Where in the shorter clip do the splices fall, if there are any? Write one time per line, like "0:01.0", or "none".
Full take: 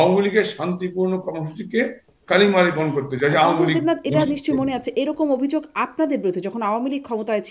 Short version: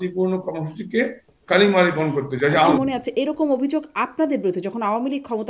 0:02.7